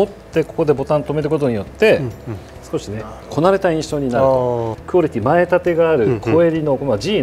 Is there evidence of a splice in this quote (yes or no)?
yes